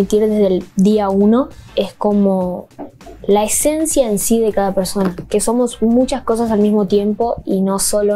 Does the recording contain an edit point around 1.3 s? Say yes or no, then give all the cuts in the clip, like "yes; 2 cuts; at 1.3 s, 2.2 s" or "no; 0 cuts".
no; 0 cuts